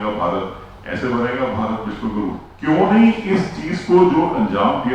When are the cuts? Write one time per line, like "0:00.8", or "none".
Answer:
0:02.5

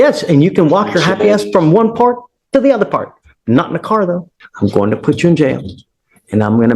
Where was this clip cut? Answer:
0:04.3

